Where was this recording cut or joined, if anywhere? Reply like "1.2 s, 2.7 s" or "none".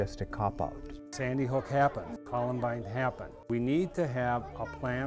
1.1 s, 2.2 s, 3.5 s